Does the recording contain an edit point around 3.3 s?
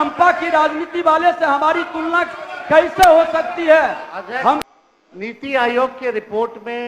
no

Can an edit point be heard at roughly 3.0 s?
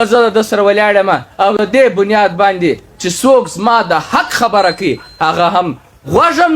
no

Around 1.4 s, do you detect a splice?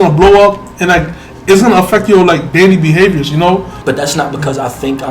no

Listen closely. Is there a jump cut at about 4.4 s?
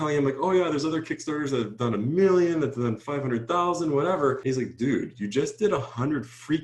yes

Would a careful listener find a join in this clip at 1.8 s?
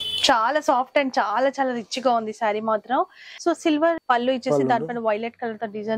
no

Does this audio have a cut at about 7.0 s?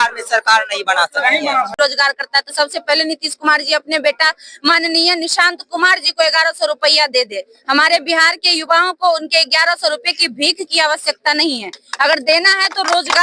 no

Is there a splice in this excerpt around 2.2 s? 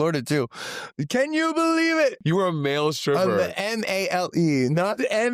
yes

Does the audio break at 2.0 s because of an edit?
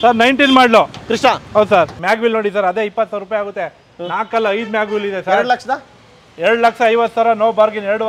yes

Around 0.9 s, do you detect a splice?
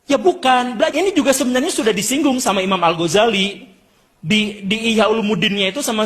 yes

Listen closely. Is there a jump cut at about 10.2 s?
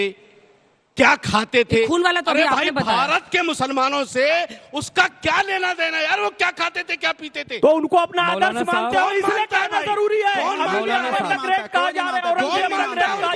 no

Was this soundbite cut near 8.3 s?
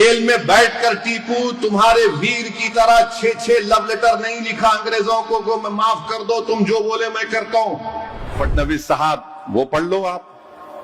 yes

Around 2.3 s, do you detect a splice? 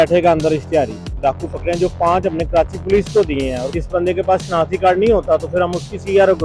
no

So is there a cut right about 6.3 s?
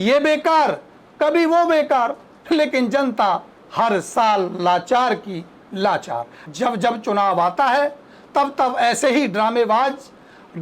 yes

